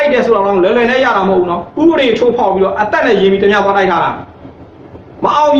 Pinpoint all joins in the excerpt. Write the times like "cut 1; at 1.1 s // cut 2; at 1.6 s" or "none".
none